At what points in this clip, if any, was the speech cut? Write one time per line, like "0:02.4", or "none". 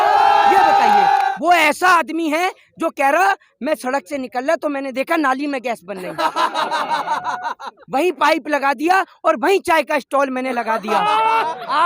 0:01.3

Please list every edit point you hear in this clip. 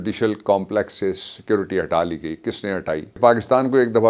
0:03.2

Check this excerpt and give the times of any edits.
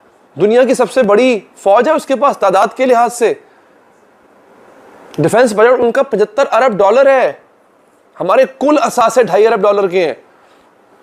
none

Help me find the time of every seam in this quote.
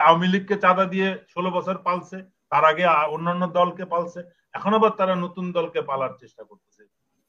none

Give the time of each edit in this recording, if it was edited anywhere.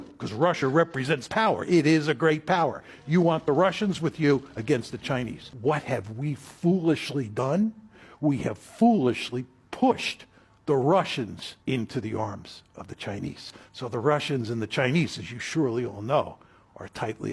0:05.4
0:11.5

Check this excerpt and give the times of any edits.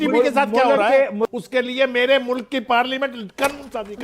0:01.0

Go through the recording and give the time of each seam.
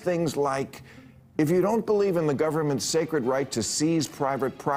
none

